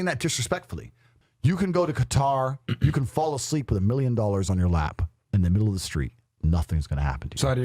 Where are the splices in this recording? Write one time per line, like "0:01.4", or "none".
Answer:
0:01.1